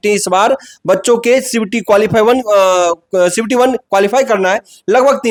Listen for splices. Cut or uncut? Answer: uncut